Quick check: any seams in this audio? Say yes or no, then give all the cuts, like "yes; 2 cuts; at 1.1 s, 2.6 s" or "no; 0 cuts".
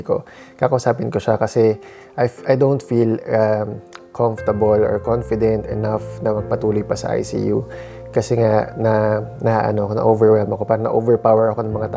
no; 0 cuts